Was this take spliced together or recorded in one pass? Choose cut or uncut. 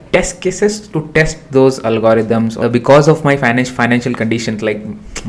cut